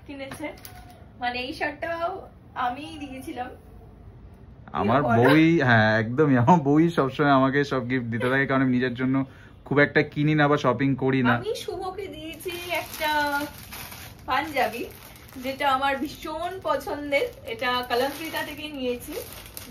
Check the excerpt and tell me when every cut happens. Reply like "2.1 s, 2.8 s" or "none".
11.5 s